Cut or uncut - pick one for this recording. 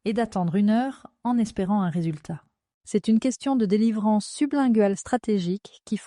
cut